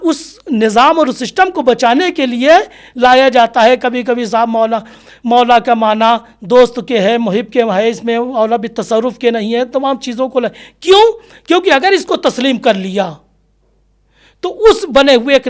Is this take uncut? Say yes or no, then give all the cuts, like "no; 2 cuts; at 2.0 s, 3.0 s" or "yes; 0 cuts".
yes; 0 cuts